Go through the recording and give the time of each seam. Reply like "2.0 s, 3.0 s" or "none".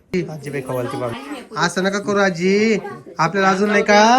1.2 s